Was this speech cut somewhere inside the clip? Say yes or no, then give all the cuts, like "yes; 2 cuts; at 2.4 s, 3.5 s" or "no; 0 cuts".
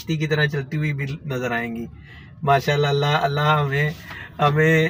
no; 0 cuts